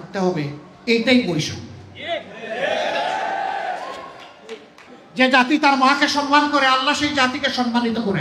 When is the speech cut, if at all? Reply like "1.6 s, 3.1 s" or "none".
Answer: none